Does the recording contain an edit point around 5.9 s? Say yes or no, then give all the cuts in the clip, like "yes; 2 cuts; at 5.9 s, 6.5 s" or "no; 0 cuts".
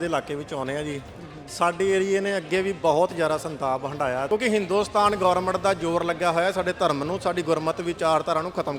no; 1 cut; at 4.3 s